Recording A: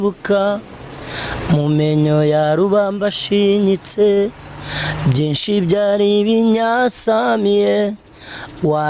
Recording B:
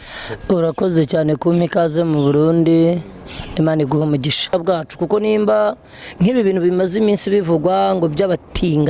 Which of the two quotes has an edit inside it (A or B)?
B